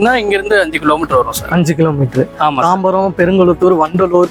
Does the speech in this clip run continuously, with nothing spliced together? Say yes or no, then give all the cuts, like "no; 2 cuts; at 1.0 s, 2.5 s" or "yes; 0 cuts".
yes; 0 cuts